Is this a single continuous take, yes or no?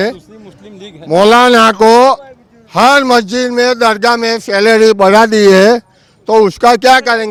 yes